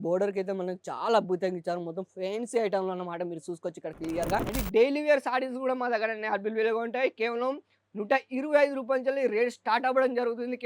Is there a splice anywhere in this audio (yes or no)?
yes